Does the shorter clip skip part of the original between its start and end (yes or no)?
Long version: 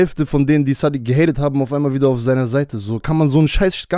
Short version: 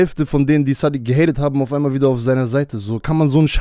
no